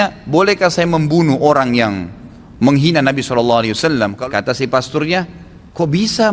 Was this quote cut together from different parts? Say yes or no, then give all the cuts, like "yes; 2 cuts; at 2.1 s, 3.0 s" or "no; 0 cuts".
yes; 1 cut; at 4.2 s